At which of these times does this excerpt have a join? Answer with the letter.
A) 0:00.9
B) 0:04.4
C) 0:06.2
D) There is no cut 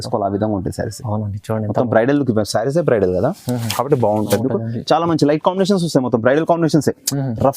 B